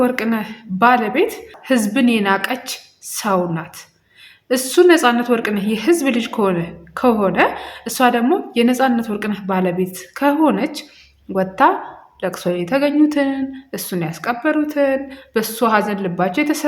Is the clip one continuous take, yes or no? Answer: no